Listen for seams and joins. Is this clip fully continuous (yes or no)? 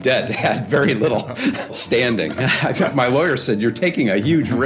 no